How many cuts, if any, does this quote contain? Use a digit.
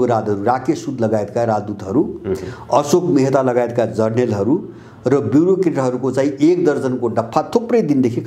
0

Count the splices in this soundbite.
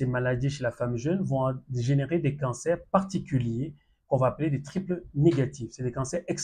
0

